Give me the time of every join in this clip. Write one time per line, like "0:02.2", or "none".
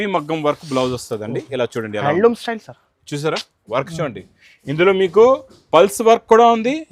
none